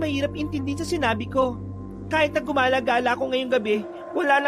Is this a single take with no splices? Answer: yes; 0 cuts

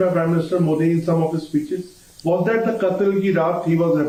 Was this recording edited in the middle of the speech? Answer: no; 0 cuts

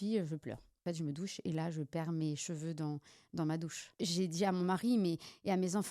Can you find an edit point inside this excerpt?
yes; 2 cuts; at 0.8 s, 4.0 s

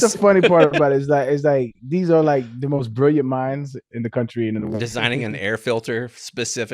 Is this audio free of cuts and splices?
no; 1 cut; at 4.9 s

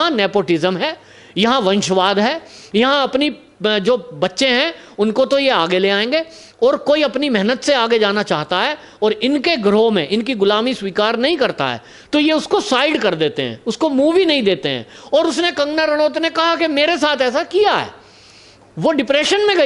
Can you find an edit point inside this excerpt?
no; 0 cuts

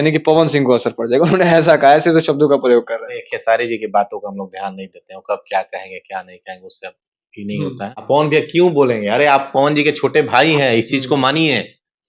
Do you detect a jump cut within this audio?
yes; 1 cut; at 8.0 s

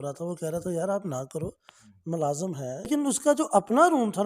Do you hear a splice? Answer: yes; 1 cut; at 2.9 s

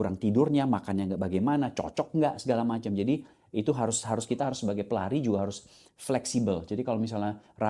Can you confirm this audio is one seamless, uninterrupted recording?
yes; 0 cuts

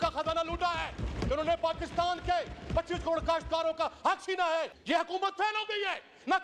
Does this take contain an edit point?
yes; 1 cut; at 4.7 s

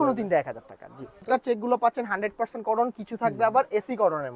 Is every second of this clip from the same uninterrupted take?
no; 1 cut; at 1.2 s

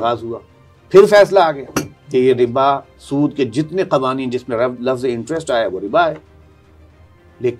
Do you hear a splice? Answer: no; 0 cuts

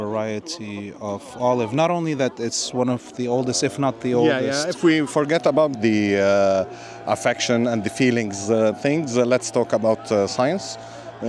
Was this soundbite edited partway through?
yes; 1 cut; at 5.7 s

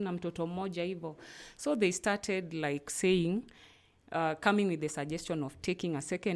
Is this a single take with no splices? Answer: yes; 0 cuts

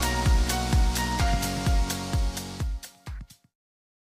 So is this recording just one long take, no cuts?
yes; 0 cuts

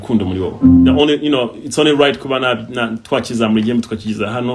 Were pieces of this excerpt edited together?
yes; 1 cut; at 1.0 s

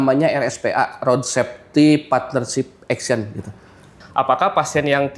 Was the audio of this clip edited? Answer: yes; 1 cut; at 3.9 s

